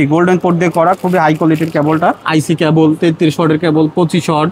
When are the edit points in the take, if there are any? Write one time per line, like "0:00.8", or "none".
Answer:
0:02.2